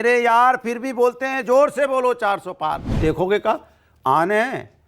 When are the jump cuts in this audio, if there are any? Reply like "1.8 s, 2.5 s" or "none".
2.9 s